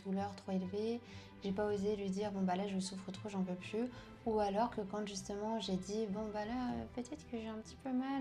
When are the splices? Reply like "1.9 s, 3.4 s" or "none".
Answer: none